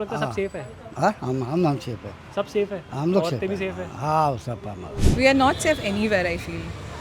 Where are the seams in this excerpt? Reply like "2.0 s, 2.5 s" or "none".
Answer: 4.9 s